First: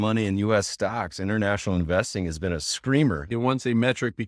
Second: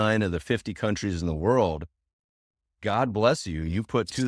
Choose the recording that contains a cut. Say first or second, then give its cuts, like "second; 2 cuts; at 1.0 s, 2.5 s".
first; 1 cut; at 3.3 s